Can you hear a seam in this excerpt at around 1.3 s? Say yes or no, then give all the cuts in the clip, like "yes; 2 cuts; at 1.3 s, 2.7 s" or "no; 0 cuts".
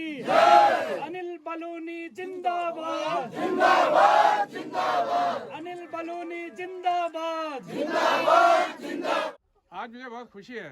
no; 1 cut; at 9.3 s